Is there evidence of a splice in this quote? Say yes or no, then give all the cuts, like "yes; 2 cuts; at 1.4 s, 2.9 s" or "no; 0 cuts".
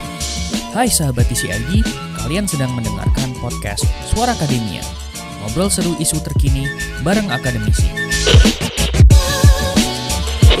no; 0 cuts